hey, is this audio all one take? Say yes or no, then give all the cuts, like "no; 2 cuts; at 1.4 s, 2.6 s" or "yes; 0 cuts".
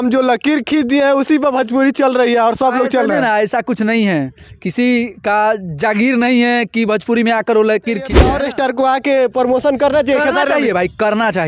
no; 1 cut; at 8.2 s